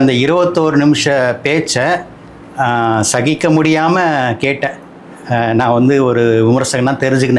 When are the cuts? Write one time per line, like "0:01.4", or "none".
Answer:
none